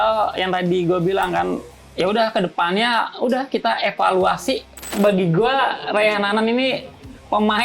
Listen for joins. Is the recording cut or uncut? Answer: cut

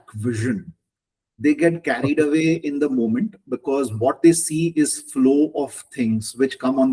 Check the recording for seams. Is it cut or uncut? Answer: uncut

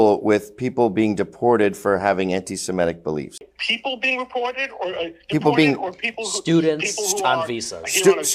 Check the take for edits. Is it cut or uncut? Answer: cut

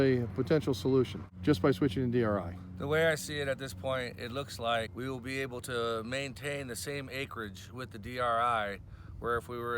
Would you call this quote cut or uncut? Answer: cut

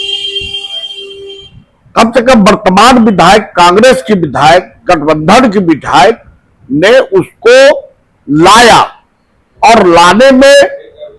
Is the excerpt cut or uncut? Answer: uncut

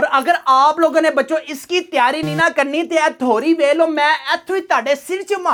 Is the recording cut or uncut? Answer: uncut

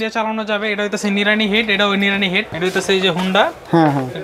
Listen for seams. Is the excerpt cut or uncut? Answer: cut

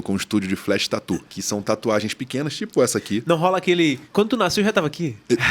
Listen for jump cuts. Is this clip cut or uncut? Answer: cut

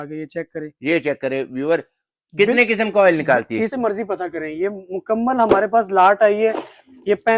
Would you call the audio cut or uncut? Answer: cut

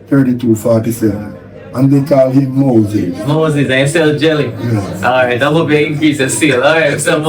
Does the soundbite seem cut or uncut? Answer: uncut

